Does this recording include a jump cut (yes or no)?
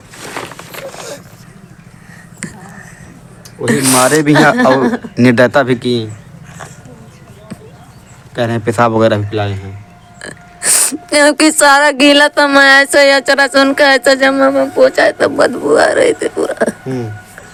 no